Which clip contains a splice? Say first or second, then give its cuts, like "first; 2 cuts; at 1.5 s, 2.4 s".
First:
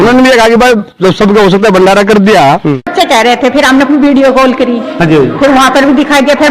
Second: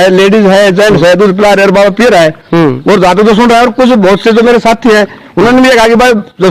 first; 1 cut; at 2.9 s